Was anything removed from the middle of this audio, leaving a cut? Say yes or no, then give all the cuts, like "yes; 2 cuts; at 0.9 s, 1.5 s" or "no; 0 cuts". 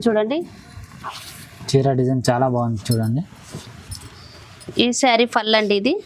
no; 0 cuts